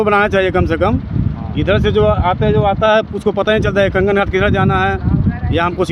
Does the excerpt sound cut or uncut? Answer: uncut